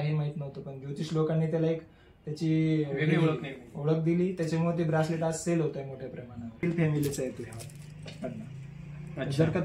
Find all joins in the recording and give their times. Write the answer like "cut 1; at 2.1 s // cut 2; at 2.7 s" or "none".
cut 1; at 6.6 s